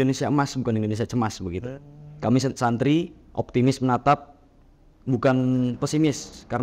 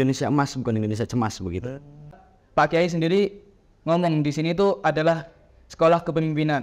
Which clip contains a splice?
second; 1 cut; at 2.1 s

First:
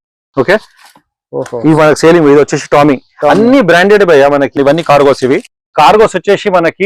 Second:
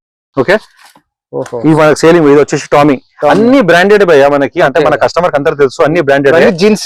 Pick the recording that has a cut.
first; 1 cut; at 4.6 s

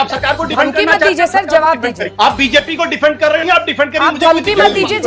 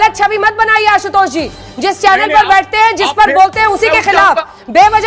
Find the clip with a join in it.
first; 1 cut; at 2.0 s

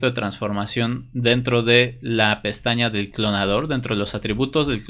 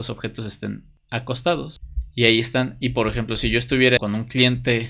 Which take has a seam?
second; 3 cuts; at 0.9 s, 1.8 s, 4.0 s

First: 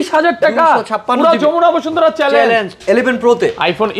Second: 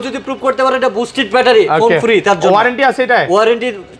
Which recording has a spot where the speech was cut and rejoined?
first; 1 cut; at 2.8 s

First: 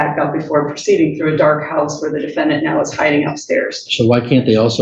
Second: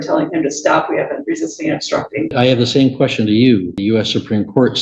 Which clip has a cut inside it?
second; 2 cuts; at 2.3 s, 3.8 s

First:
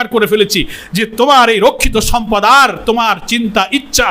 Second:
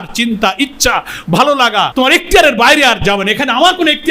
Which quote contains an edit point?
second; 1 cut; at 1.9 s

